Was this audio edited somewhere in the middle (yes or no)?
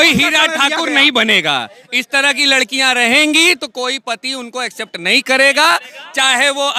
no